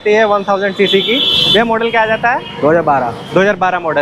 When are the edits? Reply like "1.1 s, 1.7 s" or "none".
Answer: none